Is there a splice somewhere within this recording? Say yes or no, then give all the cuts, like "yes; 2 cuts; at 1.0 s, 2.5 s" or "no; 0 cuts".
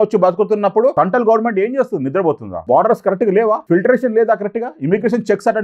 yes; 3 cuts; at 0.9 s, 2.5 s, 3.6 s